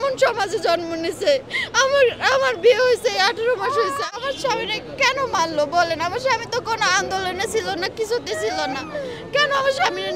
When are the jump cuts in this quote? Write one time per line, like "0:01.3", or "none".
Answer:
0:04.2